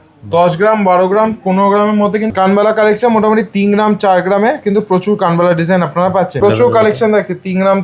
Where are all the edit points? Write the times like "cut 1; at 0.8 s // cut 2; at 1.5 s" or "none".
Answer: cut 1; at 2.3 s // cut 2; at 6.4 s